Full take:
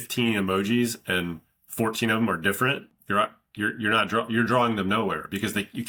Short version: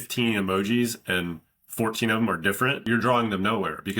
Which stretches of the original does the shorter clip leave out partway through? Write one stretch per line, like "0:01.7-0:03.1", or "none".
0:02.8-0:04.3